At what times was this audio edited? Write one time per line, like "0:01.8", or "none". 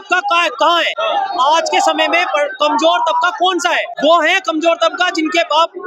0:00.9
0:03.9